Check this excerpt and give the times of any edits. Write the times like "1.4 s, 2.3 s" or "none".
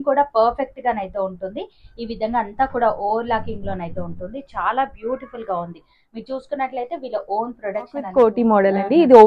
8.1 s